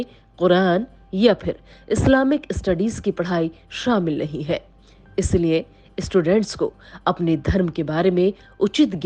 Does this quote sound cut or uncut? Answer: uncut